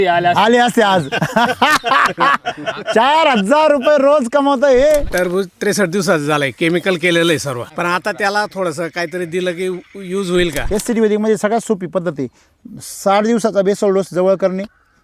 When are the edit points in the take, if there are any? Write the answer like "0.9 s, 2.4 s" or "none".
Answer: 5.1 s, 7.6 s, 10.6 s